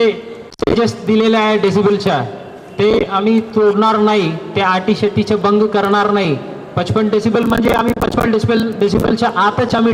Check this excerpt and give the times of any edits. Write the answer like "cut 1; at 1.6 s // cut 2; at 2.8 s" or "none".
none